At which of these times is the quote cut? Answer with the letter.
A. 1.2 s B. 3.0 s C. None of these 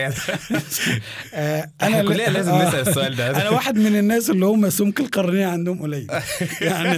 C